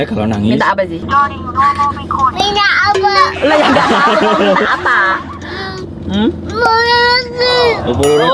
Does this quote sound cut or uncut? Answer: uncut